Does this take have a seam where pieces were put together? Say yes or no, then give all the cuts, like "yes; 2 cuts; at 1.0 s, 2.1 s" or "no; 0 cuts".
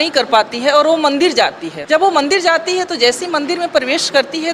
yes; 1 cut; at 1.7 s